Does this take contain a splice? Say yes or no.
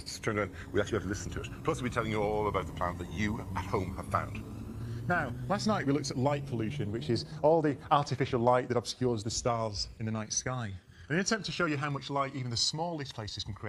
no